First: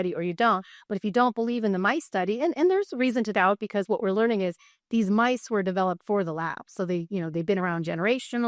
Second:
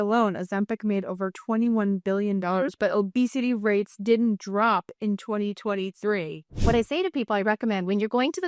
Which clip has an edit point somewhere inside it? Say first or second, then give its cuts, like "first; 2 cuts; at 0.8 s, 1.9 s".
second; 1 cut; at 6.5 s